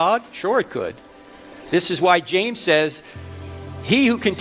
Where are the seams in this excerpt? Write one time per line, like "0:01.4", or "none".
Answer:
none

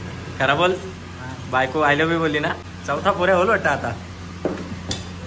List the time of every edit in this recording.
0:02.7

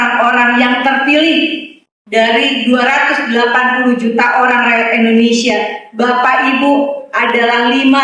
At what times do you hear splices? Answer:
none

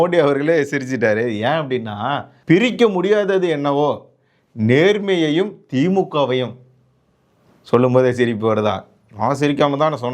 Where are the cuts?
0:02.3

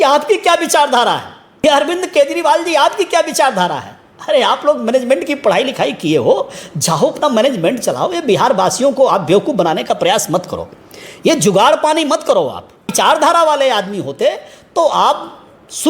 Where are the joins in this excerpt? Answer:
0:01.6
0:12.9

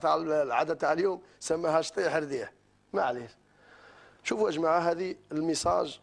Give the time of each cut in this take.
none

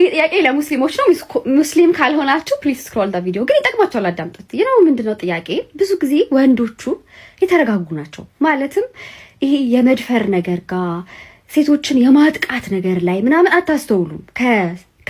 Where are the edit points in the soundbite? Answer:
none

